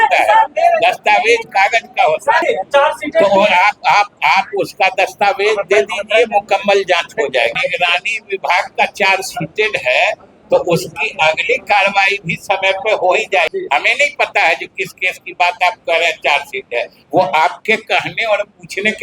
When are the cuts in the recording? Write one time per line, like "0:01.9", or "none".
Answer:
0:02.4
0:07.6
0:13.5